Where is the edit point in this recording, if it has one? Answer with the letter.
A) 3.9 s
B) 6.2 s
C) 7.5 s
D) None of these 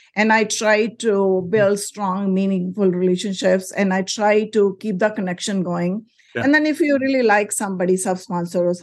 B